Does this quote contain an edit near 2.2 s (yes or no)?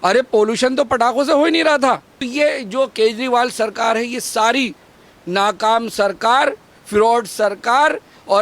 yes